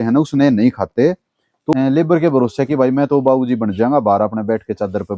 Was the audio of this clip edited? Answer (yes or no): yes